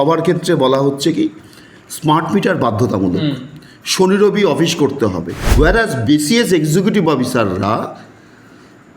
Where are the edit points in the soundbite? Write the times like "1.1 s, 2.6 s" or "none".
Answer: 5.4 s